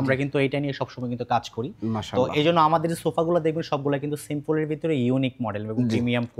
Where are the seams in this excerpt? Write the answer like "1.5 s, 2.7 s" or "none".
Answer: none